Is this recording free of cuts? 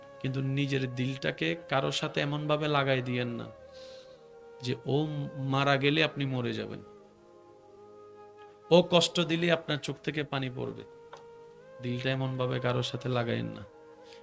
no; 2 cuts; at 6.8 s, 8.7 s

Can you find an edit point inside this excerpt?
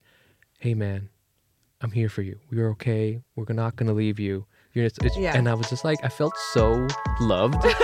no; 0 cuts

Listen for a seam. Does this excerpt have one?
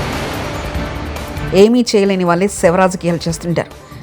yes; 1 cut; at 1.3 s

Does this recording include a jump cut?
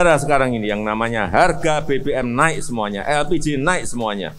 no; 0 cuts

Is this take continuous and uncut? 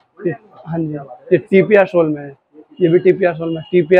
yes; 0 cuts

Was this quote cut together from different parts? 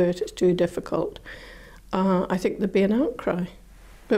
no; 0 cuts

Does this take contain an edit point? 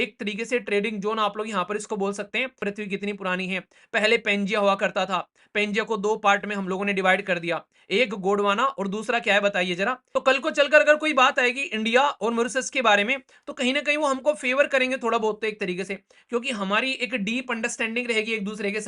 yes; 2 cuts; at 2.6 s, 10.0 s

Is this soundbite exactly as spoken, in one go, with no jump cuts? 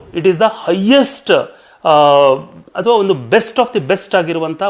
yes; 0 cuts

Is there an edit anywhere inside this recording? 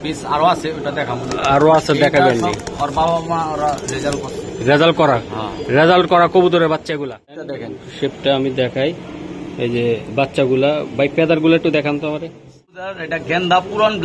yes; 2 cuts; at 7.6 s, 12.9 s

